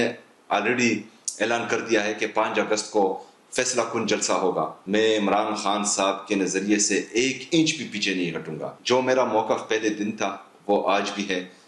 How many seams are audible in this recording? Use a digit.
2